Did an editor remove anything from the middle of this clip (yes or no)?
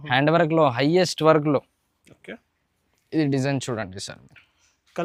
no